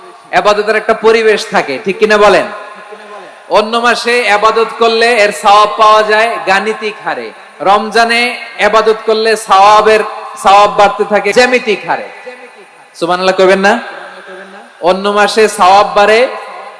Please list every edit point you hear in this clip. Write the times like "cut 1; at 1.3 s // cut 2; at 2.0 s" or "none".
cut 1; at 11.3 s